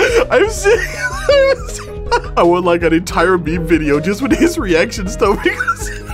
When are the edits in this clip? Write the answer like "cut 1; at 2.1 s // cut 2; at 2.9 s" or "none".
cut 1; at 2.3 s

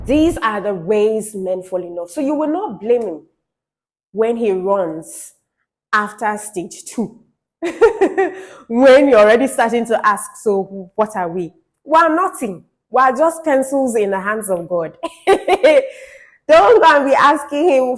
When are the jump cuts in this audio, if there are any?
none

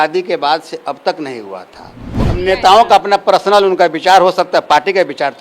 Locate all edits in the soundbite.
cut 1; at 2.2 s

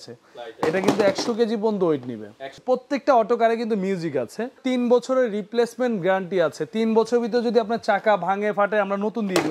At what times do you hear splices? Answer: cut 1; at 2.6 s // cut 2; at 4.6 s

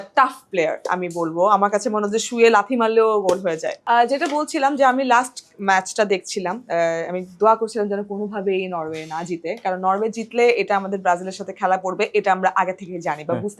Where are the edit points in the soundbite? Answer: none

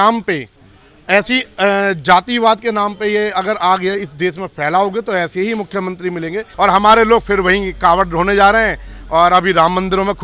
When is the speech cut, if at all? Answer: cut 1; at 6.5 s

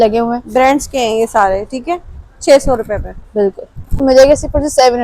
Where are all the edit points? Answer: cut 1; at 4.0 s

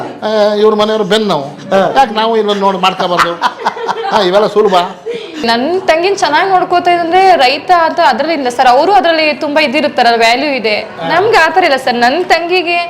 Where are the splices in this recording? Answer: cut 1; at 5.5 s

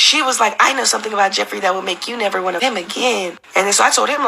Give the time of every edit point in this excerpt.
cut 1; at 2.6 s

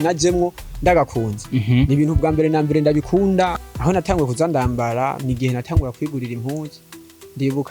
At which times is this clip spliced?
cut 1; at 3.6 s

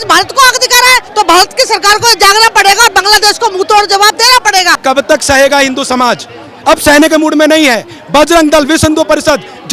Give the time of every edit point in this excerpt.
cut 1; at 1.1 s // cut 2; at 4.7 s

